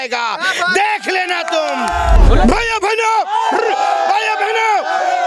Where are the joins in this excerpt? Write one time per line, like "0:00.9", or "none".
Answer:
0:02.1